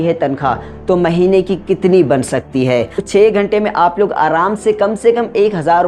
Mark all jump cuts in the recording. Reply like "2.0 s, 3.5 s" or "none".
3.1 s